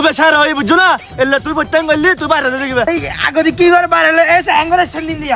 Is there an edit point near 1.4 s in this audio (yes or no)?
no